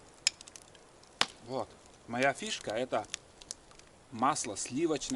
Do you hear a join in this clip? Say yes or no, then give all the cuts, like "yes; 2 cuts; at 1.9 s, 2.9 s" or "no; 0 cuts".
no; 0 cuts